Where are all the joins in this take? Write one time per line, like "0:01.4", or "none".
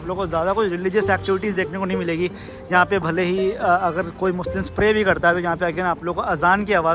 none